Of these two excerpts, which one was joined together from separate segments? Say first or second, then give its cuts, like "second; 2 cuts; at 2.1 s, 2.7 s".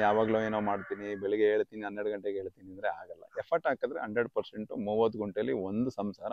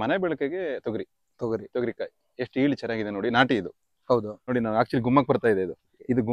second; 1 cut; at 4.5 s